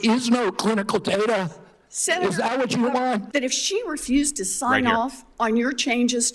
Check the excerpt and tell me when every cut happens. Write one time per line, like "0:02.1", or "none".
0:03.3